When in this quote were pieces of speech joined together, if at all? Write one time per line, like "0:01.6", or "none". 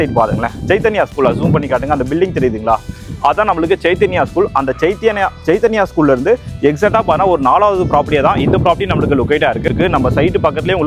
0:09.7